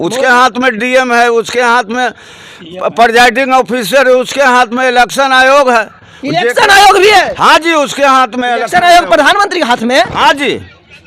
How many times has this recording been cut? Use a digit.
0